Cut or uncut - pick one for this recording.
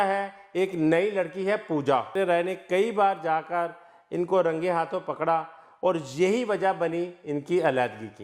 cut